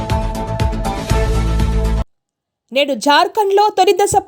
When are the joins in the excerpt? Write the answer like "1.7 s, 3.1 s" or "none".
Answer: 2.2 s